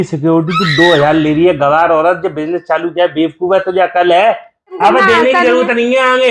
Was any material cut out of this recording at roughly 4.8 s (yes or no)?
yes